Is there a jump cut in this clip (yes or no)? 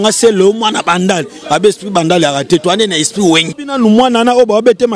yes